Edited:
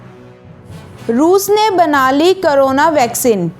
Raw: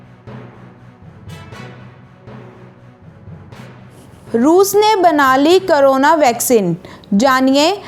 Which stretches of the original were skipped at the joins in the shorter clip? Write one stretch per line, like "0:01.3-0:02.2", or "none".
0:01.5-0:04.2